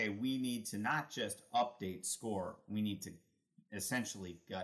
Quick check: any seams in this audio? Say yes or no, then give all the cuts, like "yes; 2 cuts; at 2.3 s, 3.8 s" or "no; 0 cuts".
no; 0 cuts